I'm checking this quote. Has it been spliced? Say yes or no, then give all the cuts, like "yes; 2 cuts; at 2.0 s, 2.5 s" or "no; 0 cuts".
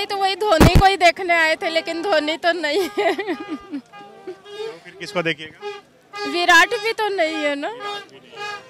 no; 0 cuts